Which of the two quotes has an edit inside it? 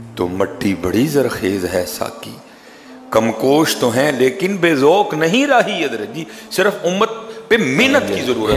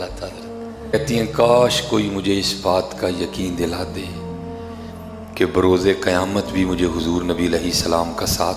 second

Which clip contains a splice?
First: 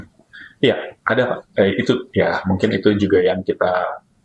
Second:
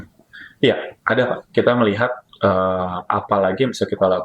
second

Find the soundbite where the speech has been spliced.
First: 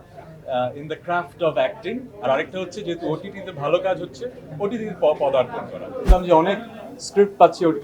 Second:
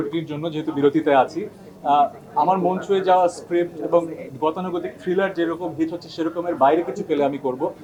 first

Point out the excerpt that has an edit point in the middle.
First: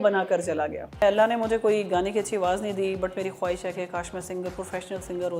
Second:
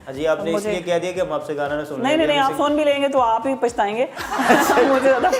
first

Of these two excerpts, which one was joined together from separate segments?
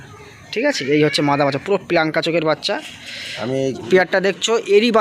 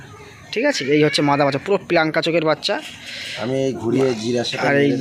first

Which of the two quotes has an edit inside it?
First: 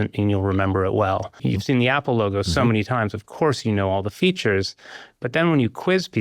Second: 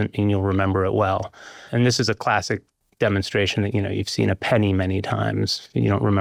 first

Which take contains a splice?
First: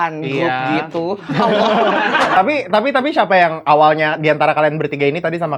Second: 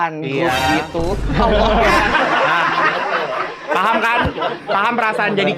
first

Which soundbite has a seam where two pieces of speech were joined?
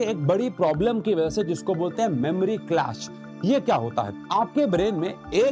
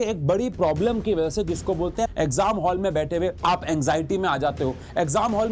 second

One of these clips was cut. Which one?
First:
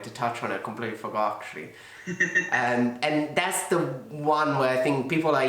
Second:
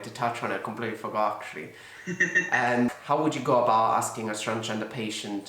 second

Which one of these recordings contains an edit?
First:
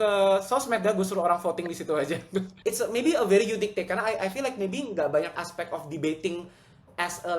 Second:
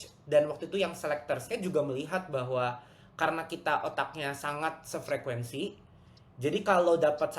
first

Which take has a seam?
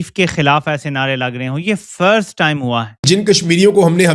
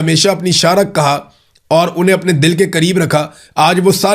first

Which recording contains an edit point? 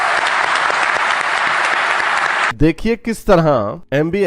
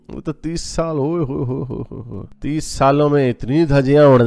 first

